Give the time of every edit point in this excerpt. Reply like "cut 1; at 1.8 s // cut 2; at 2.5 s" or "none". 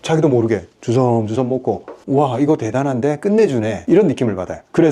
cut 1; at 1.9 s